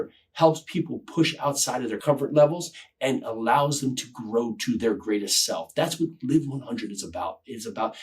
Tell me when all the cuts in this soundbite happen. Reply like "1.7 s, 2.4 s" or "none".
2.0 s